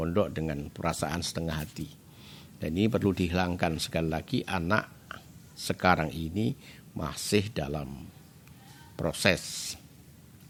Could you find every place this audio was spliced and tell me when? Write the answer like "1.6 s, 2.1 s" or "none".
none